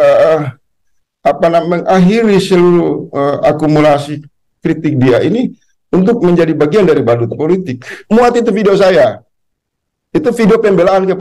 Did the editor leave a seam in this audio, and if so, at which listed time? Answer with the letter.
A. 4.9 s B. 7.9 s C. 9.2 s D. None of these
B